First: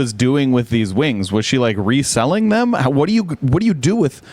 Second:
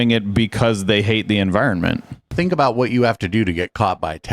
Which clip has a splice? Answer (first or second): second